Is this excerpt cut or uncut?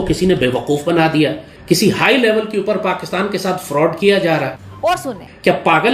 cut